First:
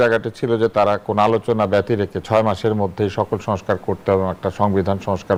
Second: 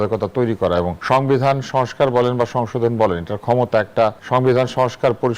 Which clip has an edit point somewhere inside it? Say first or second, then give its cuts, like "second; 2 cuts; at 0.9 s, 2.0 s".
second; 2 cuts; at 1.0 s, 4.2 s